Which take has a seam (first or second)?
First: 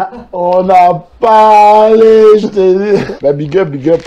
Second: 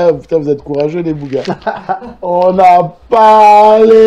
first